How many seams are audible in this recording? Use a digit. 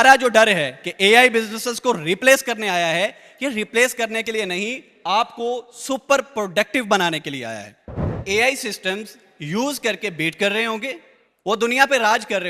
1